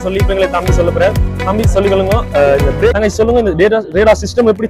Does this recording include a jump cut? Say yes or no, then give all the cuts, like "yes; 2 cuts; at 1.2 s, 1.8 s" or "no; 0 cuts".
yes; 1 cut; at 2.9 s